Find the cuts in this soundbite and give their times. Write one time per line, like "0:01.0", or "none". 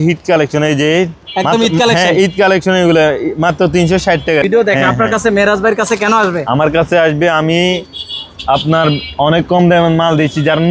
0:04.4